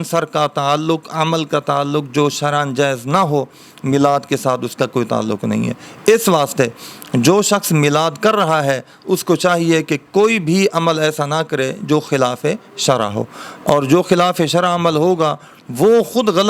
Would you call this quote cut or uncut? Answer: uncut